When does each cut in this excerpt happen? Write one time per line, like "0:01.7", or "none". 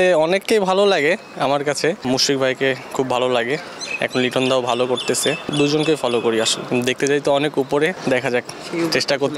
0:02.0
0:05.5
0:06.6
0:08.0